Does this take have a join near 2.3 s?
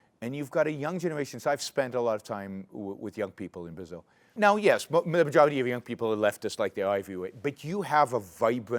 no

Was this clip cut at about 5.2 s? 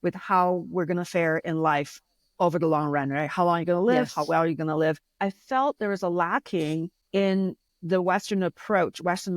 yes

